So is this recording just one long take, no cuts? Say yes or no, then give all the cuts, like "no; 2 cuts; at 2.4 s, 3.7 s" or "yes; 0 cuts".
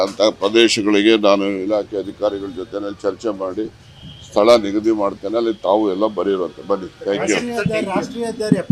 no; 1 cut; at 3.9 s